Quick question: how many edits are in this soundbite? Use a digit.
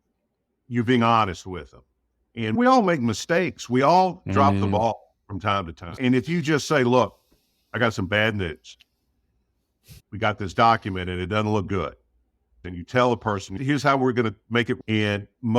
5